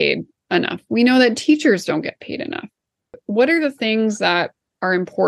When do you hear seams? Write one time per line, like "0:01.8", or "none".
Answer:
0:03.2